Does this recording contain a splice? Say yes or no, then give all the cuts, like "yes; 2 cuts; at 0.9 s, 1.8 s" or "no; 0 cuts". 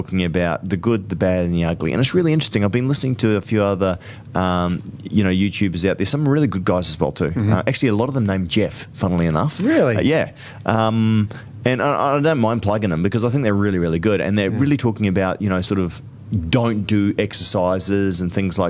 no; 0 cuts